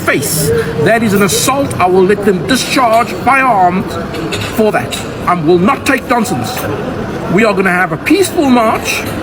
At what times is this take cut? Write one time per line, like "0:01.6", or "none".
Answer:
none